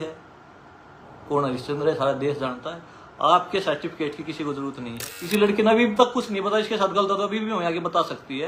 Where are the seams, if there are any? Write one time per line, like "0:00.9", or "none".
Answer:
0:05.1